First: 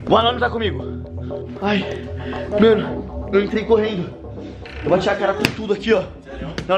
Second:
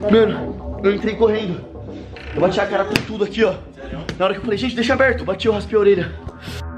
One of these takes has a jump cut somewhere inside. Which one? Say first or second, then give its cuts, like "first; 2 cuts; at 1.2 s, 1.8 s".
first; 1 cut; at 1.4 s